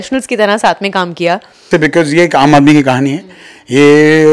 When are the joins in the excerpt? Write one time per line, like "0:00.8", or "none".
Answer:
0:01.6